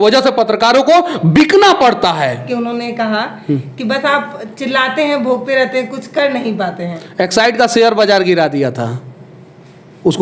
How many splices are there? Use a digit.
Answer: 1